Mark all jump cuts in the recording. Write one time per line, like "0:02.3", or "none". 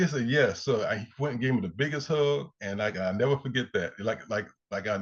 none